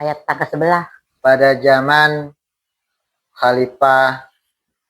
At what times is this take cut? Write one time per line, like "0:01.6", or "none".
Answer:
0:01.0